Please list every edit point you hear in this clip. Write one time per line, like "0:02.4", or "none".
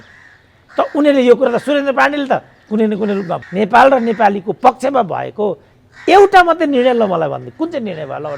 0:03.4